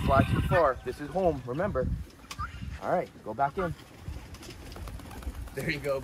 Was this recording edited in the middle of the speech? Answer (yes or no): no